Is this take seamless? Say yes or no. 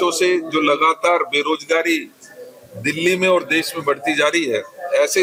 yes